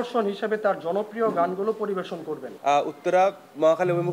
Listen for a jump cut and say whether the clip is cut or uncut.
cut